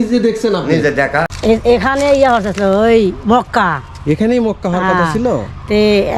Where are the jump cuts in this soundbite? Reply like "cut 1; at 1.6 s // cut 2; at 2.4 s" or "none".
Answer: cut 1; at 1.3 s